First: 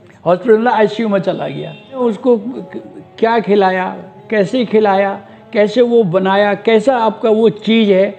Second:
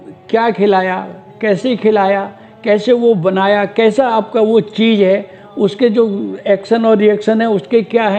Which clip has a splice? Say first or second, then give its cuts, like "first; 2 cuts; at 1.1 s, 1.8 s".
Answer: first; 1 cut; at 2.0 s